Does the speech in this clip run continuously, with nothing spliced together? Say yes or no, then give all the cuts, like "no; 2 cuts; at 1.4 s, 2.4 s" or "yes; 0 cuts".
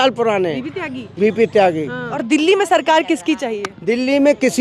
no; 1 cut; at 2.2 s